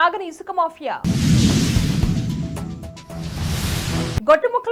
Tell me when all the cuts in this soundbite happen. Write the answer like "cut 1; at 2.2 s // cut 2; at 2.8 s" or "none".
none